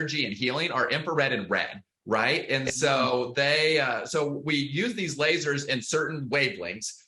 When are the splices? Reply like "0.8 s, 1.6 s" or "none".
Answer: none